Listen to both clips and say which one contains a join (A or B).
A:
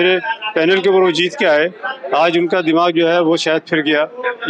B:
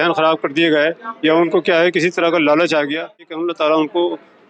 B